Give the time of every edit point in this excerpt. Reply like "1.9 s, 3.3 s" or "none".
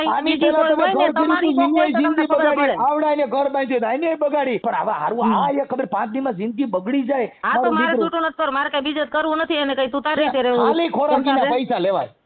4.6 s